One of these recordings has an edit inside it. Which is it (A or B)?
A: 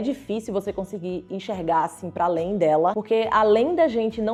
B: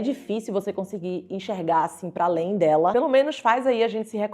B